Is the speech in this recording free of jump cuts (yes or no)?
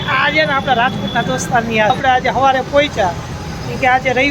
no